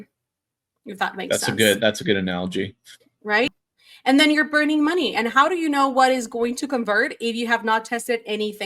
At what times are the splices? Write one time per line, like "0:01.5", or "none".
0:03.5